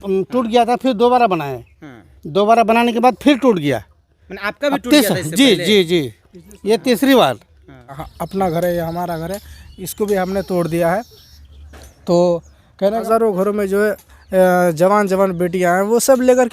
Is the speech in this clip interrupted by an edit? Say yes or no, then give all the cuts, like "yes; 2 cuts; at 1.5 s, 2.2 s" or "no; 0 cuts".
yes; 2 cuts; at 8.0 s, 13.0 s